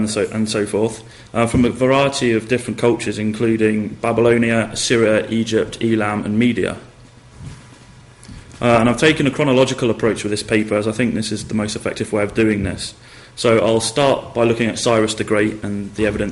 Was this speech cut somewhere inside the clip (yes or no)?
yes